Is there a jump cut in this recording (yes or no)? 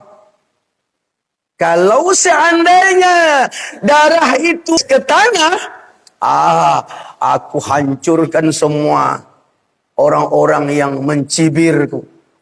yes